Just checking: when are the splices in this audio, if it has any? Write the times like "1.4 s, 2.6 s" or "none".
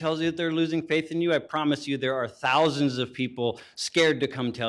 none